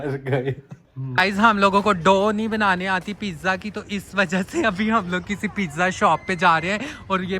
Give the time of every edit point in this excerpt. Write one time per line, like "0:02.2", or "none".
0:01.1